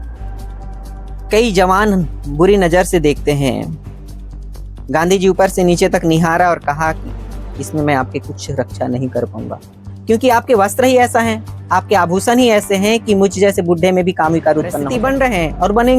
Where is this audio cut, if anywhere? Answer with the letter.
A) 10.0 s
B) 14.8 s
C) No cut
B